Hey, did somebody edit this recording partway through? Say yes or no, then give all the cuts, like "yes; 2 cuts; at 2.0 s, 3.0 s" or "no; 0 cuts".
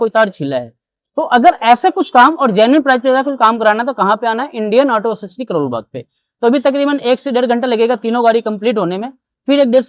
no; 0 cuts